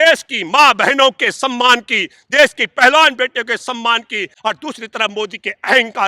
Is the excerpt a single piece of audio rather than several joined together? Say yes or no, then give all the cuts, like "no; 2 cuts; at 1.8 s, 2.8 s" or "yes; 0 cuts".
no; 1 cut; at 4.3 s